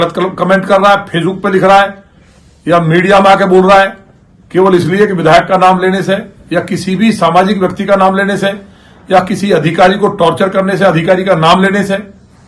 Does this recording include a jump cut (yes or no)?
no